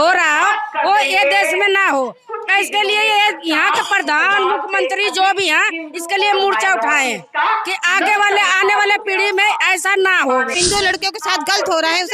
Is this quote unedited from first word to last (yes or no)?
no